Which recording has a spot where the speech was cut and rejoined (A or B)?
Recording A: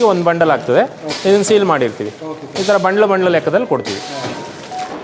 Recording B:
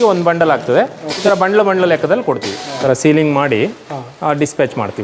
B